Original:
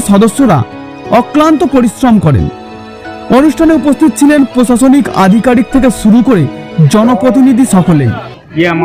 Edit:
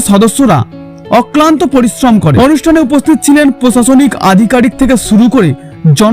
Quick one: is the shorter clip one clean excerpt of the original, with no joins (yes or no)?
no